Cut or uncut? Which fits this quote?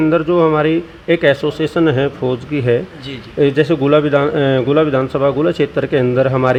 uncut